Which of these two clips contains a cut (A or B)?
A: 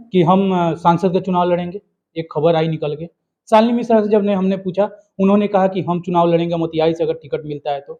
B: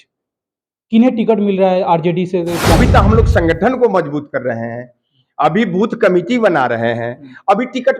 B